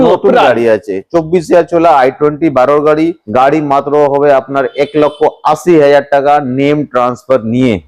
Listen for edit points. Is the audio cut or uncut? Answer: cut